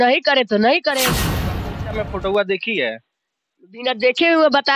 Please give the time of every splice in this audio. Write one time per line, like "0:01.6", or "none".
0:01.4